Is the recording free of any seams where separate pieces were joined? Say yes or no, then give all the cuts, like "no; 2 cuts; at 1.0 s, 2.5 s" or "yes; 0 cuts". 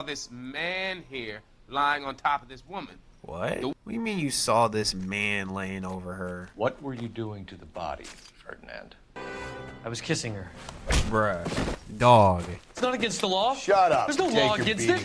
no; 3 cuts; at 3.7 s, 6.5 s, 9.2 s